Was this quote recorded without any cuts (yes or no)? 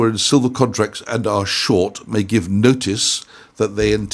yes